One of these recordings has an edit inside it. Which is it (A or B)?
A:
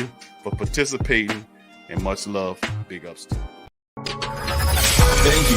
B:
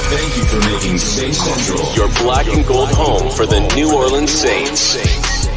A